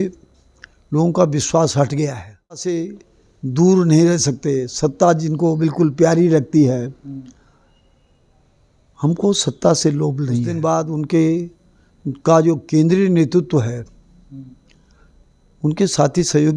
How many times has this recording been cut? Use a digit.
2